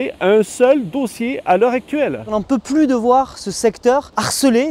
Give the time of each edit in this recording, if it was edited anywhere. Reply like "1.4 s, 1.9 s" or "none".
2.3 s